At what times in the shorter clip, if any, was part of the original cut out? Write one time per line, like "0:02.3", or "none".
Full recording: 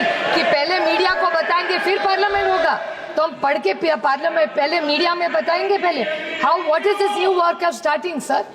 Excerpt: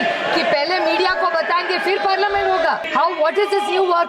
0:02.8